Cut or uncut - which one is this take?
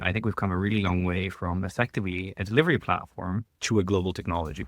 cut